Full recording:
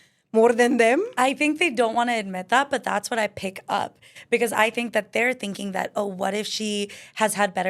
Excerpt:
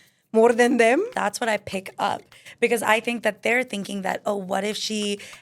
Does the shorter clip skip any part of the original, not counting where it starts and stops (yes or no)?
yes